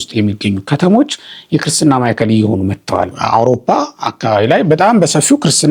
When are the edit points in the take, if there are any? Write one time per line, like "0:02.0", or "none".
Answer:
0:03.1